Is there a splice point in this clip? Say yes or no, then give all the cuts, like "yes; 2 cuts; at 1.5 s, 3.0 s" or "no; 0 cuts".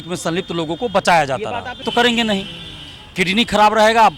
yes; 1 cut; at 1.9 s